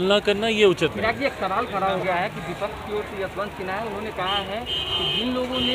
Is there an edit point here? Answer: no; 0 cuts

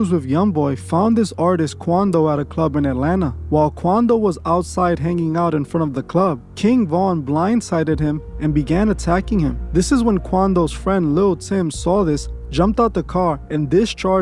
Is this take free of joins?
yes; 0 cuts

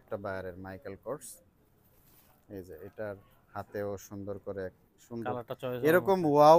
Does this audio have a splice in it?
yes; 1 cut; at 5.0 s

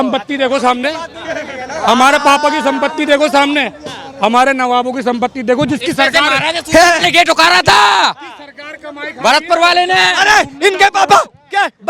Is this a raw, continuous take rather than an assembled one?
yes; 0 cuts

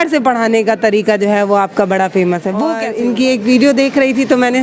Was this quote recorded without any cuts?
no; 1 cut; at 2.8 s

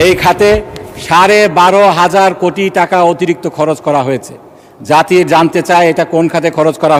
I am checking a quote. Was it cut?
no; 0 cuts

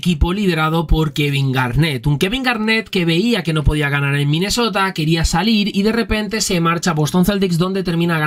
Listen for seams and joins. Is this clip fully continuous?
yes; 0 cuts

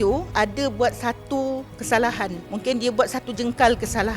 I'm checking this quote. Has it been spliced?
yes; 1 cut; at 2.4 s

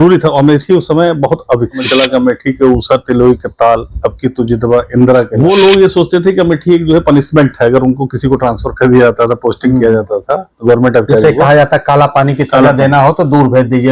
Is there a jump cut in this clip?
yes; 2 cuts; at 1.8 s, 5.3 s

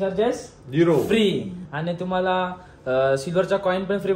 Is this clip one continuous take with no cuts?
yes; 0 cuts

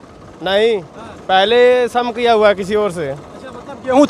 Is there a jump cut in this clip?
no; 0 cuts

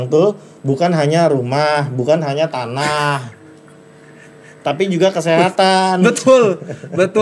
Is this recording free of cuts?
yes; 0 cuts

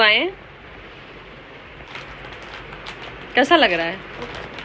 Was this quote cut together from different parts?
no; 0 cuts

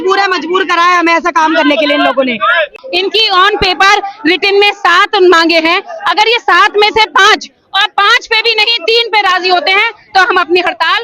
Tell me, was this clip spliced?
yes; 1 cut; at 2.8 s

